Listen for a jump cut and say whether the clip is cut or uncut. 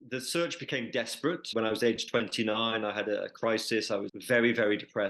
cut